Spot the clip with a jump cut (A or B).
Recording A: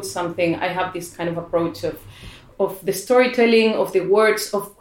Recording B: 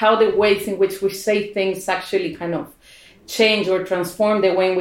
A